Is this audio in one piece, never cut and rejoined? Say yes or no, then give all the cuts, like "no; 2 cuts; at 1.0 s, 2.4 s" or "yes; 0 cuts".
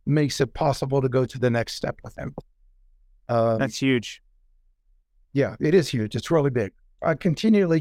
no; 1 cut; at 6.9 s